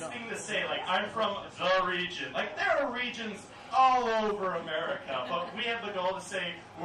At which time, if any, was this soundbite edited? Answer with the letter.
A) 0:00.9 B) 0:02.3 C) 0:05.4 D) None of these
B